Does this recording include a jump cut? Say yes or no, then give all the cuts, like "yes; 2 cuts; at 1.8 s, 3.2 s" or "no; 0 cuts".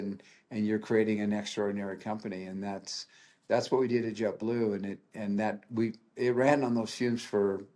no; 0 cuts